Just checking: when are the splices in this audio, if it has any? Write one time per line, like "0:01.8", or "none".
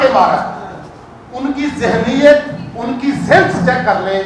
none